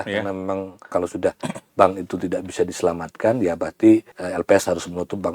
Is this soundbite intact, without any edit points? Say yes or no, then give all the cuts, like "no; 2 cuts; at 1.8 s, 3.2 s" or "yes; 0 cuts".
no; 2 cuts; at 0.8 s, 4.2 s